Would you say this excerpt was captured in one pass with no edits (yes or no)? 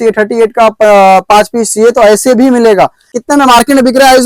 no